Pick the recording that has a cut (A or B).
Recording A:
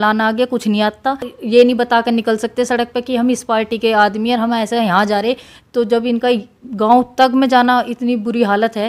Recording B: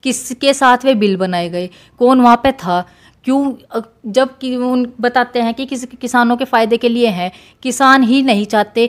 A